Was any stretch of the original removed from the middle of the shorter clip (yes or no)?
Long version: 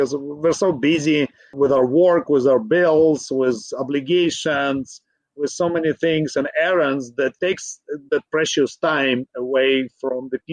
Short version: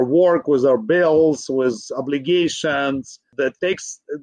yes